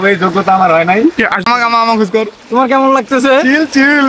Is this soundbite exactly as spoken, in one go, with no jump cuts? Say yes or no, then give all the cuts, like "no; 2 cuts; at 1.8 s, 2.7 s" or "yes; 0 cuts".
no; 1 cut; at 1.4 s